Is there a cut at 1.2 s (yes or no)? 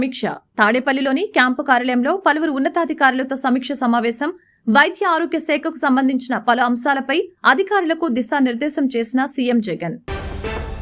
no